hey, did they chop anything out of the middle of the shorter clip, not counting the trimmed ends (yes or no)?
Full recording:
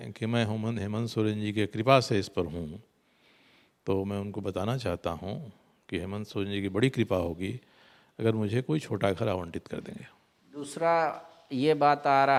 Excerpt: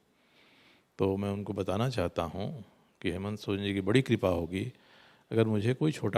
no